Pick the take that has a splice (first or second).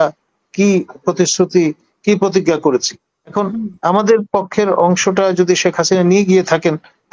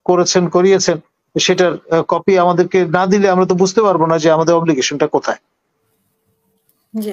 first